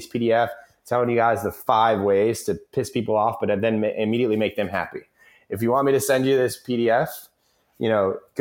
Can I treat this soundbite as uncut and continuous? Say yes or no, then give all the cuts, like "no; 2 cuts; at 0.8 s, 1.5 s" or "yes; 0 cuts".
yes; 0 cuts